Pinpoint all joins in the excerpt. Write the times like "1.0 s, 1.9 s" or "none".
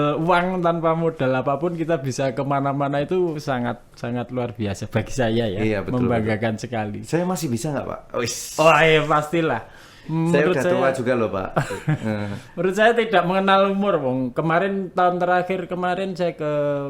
none